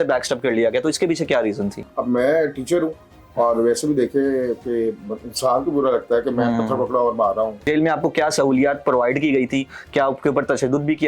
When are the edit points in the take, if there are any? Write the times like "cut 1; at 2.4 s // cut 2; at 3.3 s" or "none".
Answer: cut 1; at 1.9 s // cut 2; at 7.6 s